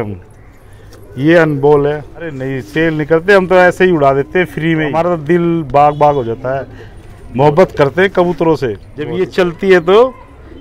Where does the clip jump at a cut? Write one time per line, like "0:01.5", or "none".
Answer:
0:02.5
0:05.0
0:09.2